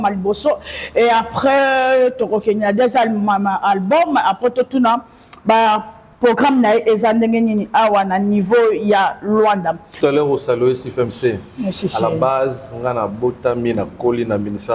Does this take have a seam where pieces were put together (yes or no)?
yes